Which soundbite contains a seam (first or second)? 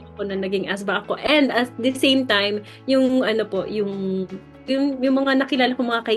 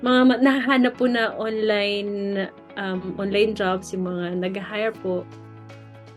first